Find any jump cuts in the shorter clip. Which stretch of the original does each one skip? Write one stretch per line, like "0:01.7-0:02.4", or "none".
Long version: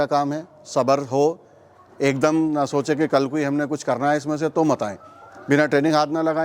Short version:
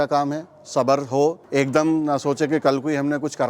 0:01.4-0:01.9